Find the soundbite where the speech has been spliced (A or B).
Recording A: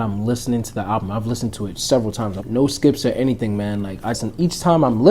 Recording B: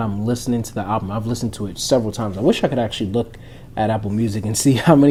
A